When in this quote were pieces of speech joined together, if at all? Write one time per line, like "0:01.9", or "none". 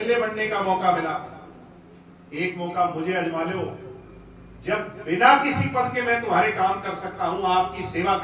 none